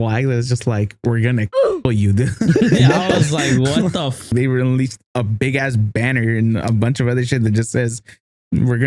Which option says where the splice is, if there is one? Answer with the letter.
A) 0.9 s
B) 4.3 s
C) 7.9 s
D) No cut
B